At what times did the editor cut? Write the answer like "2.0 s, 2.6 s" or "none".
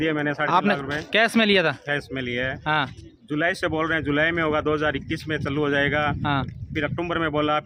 none